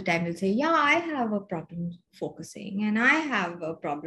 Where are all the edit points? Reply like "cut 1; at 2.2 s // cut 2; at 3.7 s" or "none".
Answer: none